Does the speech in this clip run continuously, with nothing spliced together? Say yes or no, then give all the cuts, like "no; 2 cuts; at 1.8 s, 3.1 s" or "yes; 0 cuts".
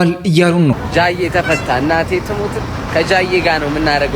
yes; 0 cuts